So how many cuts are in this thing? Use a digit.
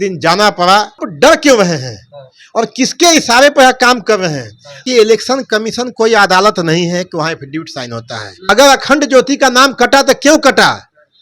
3